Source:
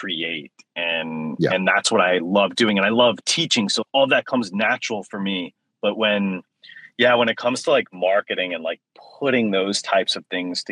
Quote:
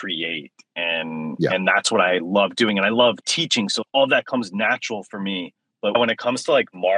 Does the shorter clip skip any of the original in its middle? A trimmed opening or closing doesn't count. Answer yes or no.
yes